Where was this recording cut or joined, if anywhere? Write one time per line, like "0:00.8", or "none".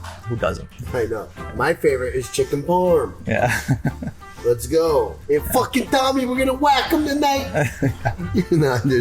0:05.2